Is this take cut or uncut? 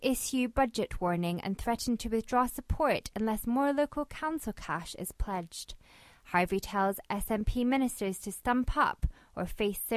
uncut